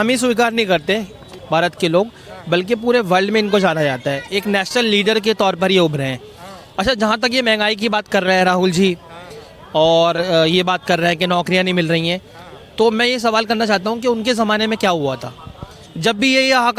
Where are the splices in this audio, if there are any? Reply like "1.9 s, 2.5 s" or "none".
1.3 s